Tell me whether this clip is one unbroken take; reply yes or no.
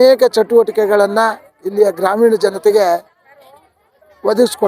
yes